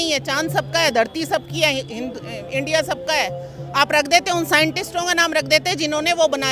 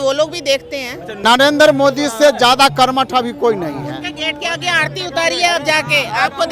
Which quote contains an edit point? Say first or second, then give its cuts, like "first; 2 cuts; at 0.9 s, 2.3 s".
second; 1 cut; at 1.1 s